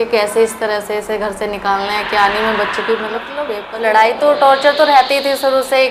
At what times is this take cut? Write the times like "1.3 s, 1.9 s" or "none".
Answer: 3.6 s